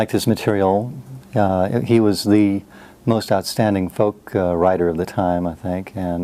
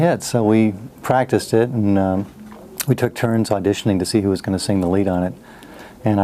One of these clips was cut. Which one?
second; 1 cut; at 3.5 s

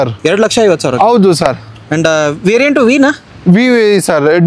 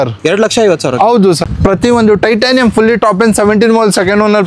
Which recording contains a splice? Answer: second; 1 cut; at 1.4 s

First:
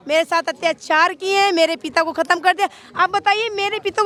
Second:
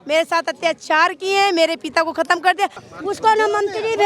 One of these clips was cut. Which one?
second; 1 cut; at 2.8 s

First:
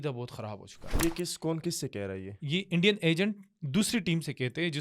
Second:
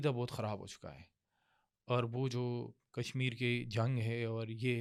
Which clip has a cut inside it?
first; 1 cut; at 0.9 s

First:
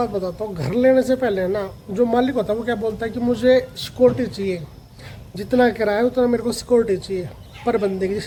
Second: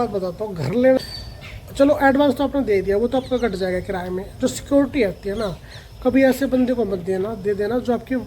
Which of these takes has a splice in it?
second; 1 cut; at 1.0 s

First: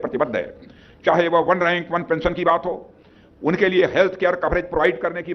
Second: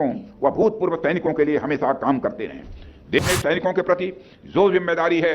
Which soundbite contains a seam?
second; 1 cut; at 3.2 s

